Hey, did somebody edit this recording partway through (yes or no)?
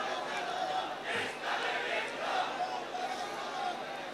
no